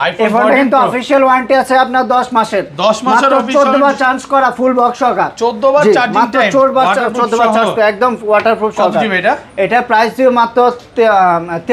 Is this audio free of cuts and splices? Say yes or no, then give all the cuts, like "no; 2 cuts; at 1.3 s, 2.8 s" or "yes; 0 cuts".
yes; 0 cuts